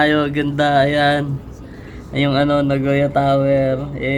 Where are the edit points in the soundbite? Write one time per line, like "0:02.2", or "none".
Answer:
none